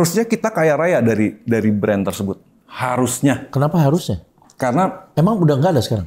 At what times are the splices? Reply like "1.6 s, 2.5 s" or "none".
none

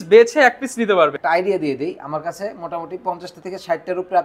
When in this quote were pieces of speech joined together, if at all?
1.2 s

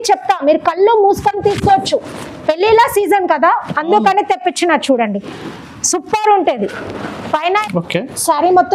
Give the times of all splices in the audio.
7.6 s

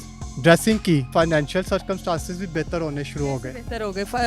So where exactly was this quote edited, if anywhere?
1.1 s

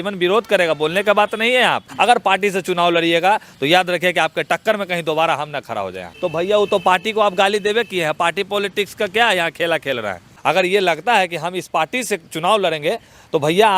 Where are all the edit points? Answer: 1.8 s, 6.1 s, 10.3 s

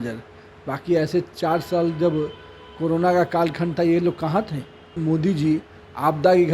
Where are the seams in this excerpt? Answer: 5.0 s

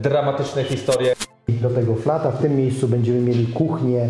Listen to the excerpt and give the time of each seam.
1.4 s

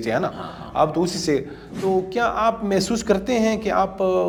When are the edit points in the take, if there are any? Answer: none

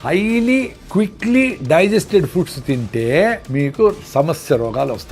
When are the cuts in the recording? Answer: 3.4 s

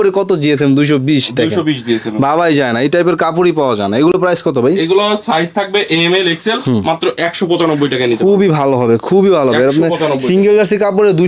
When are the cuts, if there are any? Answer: none

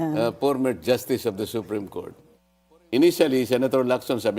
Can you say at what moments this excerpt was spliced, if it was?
2.8 s

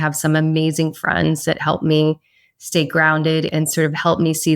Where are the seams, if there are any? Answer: 3.5 s

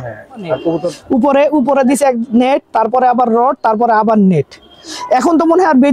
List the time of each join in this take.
0.9 s

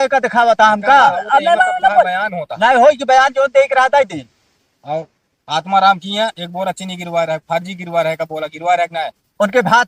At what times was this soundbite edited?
none

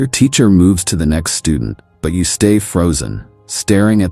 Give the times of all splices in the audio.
3.0 s

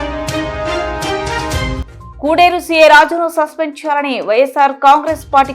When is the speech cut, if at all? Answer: 1.8 s

